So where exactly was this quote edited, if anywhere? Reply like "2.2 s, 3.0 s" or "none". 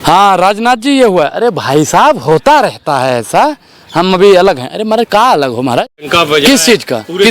6.1 s